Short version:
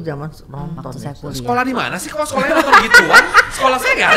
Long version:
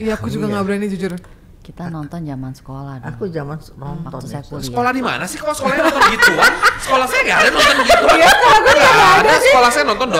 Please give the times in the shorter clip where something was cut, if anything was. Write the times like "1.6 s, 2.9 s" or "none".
none